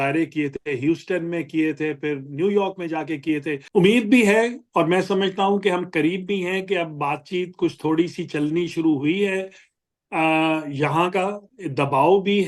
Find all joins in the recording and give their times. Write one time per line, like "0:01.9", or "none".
0:03.6